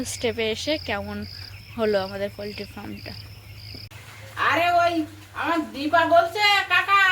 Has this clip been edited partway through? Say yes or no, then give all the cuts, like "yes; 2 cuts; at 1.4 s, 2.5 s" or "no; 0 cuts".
yes; 1 cut; at 3.9 s